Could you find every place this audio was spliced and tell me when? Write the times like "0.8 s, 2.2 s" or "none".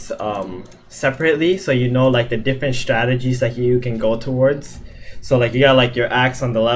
none